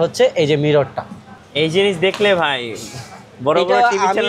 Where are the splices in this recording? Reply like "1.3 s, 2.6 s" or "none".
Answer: none